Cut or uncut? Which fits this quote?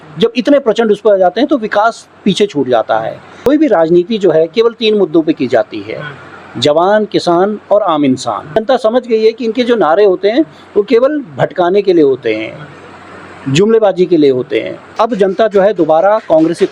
cut